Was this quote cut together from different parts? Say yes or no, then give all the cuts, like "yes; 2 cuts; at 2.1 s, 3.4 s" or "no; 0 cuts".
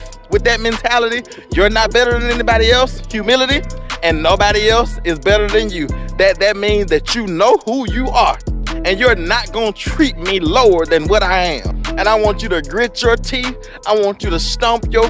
yes; 1 cut; at 11.8 s